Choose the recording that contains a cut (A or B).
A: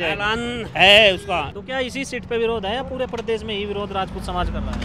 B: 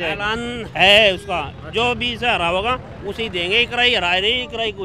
A